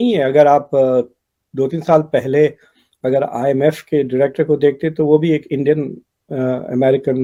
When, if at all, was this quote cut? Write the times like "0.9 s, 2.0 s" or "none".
none